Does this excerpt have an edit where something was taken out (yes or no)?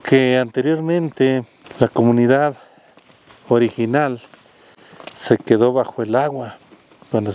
yes